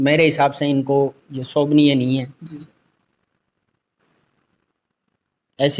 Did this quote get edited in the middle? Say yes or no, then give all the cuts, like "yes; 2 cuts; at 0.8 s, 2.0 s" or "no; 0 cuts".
no; 0 cuts